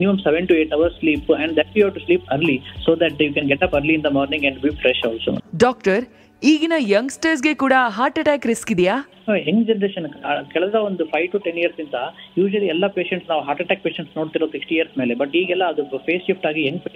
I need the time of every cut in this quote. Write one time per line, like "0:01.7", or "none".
0:05.5